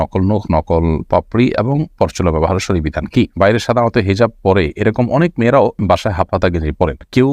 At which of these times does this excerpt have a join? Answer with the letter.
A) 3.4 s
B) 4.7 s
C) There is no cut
A